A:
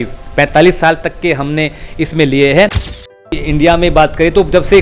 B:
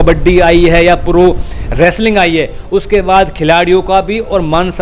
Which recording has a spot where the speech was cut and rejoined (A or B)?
A